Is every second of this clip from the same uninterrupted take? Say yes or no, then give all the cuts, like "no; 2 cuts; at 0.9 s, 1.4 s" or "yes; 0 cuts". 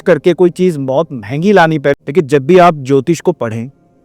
no; 1 cut; at 1.9 s